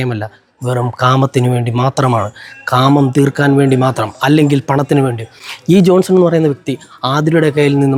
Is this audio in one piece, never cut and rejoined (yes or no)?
yes